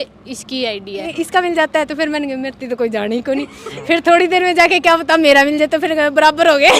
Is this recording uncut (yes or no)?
no